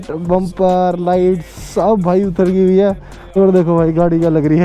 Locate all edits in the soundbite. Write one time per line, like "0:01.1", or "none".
0:03.3